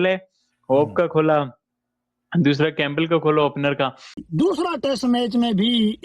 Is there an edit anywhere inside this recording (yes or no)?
yes